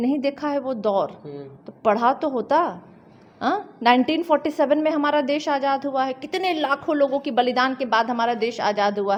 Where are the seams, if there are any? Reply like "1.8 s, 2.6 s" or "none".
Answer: none